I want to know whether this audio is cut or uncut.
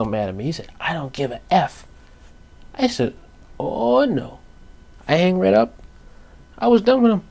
uncut